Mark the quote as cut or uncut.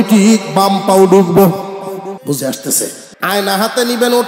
cut